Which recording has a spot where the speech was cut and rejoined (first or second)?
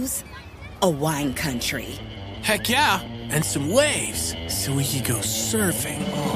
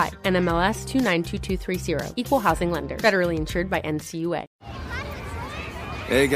second